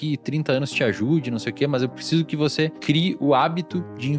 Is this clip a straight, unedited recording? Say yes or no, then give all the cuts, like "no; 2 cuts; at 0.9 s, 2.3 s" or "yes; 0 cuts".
no; 1 cut; at 2.8 s